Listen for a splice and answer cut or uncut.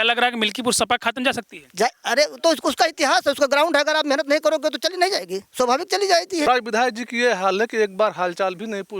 cut